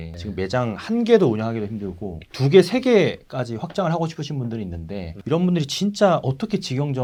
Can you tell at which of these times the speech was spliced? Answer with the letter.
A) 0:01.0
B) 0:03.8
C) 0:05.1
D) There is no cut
D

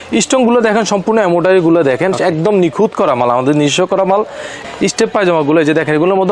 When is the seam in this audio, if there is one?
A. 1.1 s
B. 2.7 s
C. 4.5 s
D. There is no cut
C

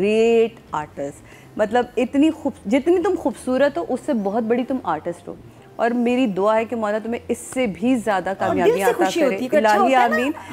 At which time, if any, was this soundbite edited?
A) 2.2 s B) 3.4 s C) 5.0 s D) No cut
D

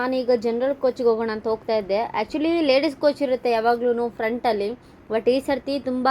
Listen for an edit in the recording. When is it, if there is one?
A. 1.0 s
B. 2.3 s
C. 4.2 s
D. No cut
D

